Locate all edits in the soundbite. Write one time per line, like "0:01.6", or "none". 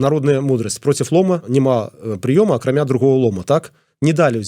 0:01.5